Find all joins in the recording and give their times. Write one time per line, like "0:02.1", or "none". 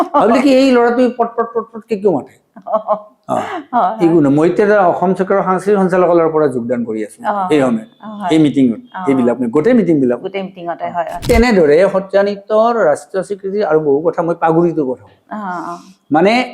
0:11.2

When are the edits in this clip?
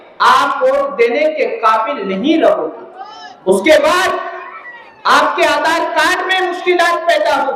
none

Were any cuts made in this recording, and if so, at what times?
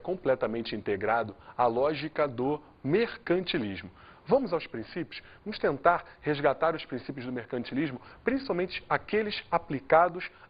none

